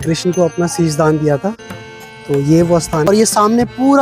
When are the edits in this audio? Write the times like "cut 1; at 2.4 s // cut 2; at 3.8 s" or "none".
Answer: cut 1; at 3.1 s